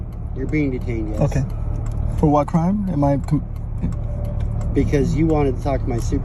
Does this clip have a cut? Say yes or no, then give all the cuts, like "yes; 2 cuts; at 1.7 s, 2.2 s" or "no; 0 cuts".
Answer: no; 0 cuts